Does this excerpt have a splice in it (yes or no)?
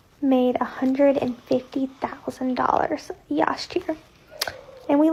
no